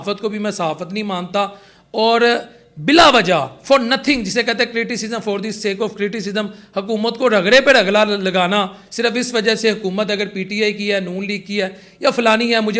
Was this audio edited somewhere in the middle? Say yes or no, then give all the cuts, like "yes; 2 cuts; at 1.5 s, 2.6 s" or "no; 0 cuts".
no; 0 cuts